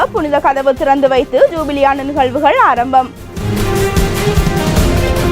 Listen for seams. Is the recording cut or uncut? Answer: cut